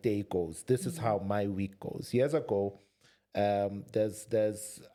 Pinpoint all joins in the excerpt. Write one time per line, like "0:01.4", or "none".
none